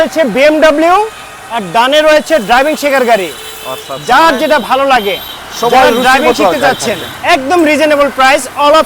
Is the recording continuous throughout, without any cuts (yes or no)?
yes